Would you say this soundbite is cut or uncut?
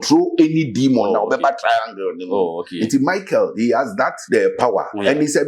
cut